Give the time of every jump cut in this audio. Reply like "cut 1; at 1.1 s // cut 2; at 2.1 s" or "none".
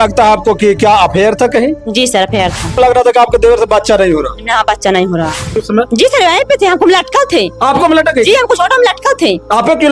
cut 1; at 2.8 s // cut 2; at 5.6 s